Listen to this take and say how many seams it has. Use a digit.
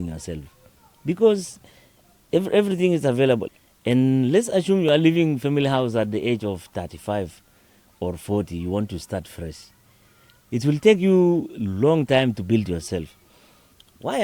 1